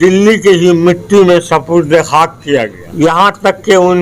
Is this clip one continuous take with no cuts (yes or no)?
no